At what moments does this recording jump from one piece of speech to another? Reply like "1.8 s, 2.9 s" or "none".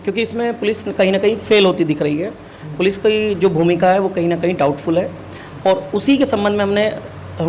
none